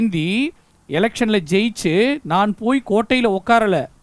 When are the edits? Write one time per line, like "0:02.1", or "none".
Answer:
none